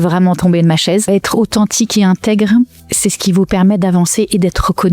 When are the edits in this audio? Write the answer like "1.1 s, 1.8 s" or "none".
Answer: 1.1 s, 2.8 s